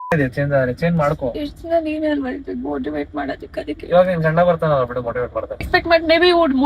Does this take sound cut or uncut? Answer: cut